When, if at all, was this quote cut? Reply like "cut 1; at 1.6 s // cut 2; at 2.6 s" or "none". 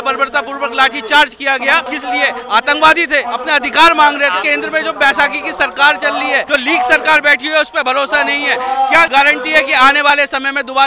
cut 1; at 1.9 s // cut 2; at 3.3 s // cut 3; at 4.4 s // cut 4; at 6.4 s // cut 5; at 9.1 s

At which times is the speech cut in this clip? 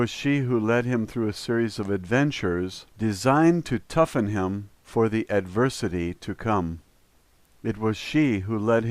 cut 1; at 5.7 s

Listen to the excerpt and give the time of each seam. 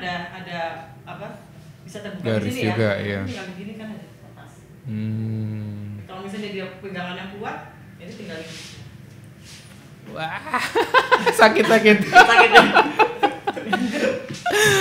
none

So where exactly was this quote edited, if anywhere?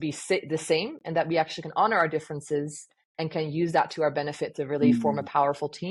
none

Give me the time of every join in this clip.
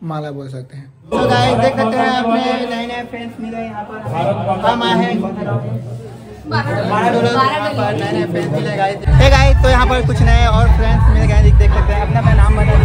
cut 1; at 1.0 s // cut 2; at 9.1 s

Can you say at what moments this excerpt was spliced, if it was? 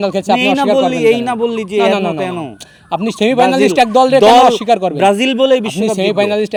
none

